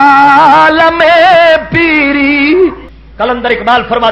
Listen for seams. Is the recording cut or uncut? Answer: cut